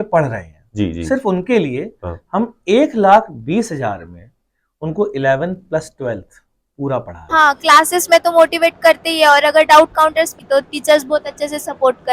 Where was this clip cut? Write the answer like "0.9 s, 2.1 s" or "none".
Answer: 7.2 s, 10.4 s